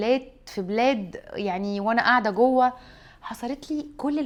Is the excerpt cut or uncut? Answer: uncut